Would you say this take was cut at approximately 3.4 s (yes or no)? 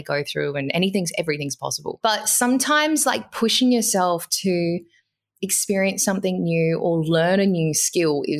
no